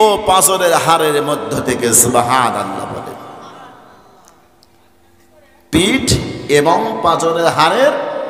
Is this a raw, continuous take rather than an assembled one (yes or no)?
yes